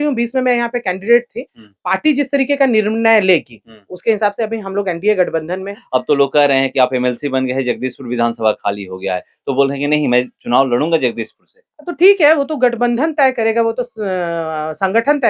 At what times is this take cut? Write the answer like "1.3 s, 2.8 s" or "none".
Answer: 5.8 s